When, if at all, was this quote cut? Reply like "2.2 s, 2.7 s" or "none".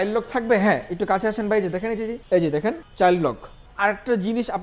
2.2 s, 2.8 s, 3.6 s